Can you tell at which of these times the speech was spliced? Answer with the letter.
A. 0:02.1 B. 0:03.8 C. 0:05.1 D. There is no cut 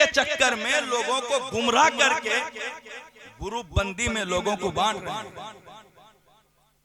D